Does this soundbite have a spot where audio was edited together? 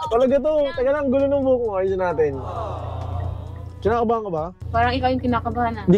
no; 0 cuts

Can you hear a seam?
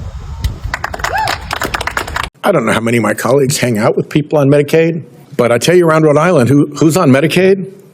yes; 1 cut; at 2.3 s

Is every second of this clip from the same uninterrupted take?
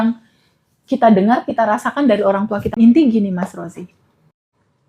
no; 1 cut; at 2.7 s

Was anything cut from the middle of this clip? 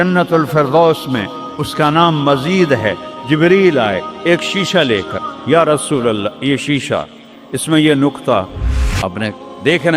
no; 0 cuts

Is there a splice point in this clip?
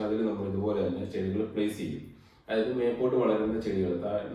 no; 0 cuts

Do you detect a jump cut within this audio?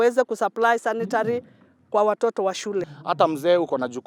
yes; 1 cut; at 2.9 s

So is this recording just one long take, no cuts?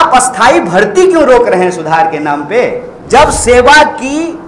no; 1 cut; at 2.9 s

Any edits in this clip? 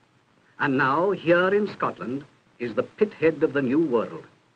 yes; 1 cut; at 1.8 s

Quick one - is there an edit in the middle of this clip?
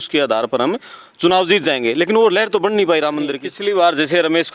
yes; 1 cut; at 3.5 s

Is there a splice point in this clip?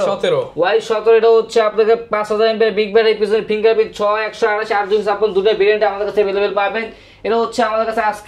no; 0 cuts

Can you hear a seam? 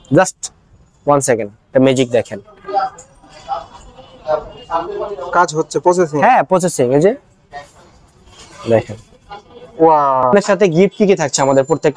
yes; 1 cut; at 10.3 s

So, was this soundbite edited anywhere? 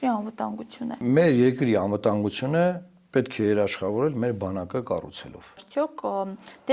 yes; 2 cuts; at 1.0 s, 5.6 s

